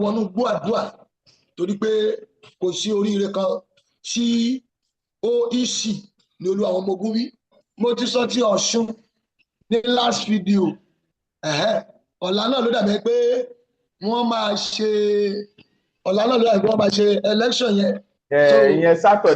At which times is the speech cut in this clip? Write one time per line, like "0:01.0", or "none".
0:07.5